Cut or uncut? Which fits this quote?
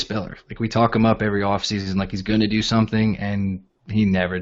uncut